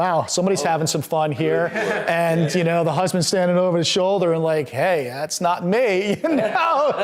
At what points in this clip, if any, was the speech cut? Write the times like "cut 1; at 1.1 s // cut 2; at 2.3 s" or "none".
none